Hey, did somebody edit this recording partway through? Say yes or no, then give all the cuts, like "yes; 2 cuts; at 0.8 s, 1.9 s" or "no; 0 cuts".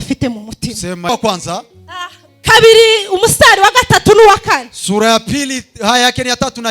yes; 1 cut; at 1.1 s